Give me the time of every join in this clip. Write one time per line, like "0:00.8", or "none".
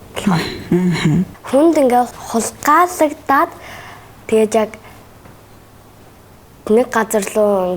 0:01.3